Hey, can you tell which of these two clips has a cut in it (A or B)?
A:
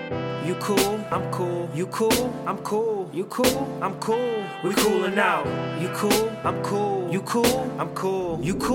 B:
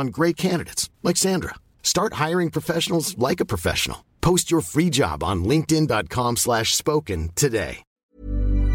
B